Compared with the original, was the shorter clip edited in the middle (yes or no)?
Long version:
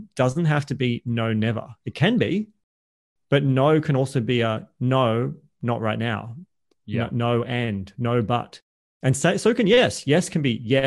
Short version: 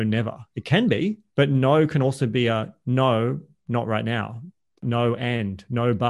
yes